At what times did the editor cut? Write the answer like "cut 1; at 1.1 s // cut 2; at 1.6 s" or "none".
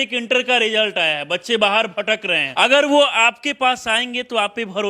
cut 1; at 2.4 s